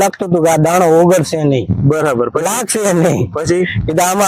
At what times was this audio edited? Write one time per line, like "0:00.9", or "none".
none